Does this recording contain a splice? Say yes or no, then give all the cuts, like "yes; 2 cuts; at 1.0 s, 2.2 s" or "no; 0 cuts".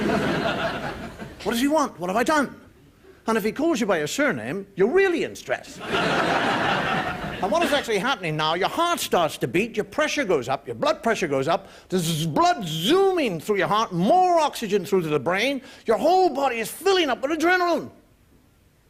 no; 0 cuts